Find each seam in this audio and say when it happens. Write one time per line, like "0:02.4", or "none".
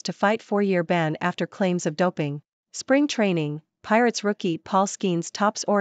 0:02.5